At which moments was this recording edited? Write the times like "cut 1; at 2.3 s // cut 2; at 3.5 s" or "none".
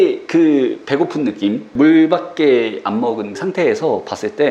cut 1; at 1.7 s // cut 2; at 3.4 s